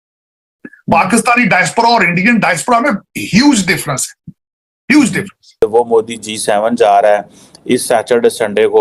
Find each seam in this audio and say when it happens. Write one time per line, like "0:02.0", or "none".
0:05.6